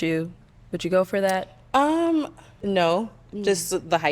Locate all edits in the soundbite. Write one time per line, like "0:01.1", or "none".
0:02.4